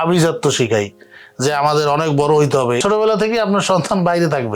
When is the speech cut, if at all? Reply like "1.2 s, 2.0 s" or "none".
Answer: 2.8 s